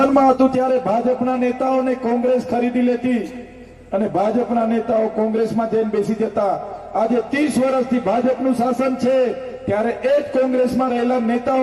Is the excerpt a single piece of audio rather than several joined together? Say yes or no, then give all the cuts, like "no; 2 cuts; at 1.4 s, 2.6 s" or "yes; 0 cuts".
yes; 0 cuts